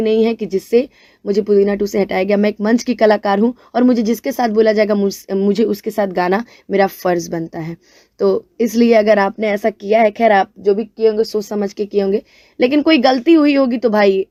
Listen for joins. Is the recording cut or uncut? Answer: uncut